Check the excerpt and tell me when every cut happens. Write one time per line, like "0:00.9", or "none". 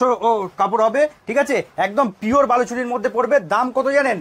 none